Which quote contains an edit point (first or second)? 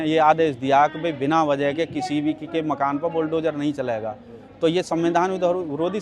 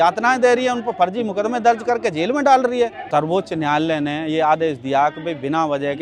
second